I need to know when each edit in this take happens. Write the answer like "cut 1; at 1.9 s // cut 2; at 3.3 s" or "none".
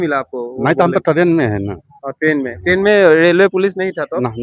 none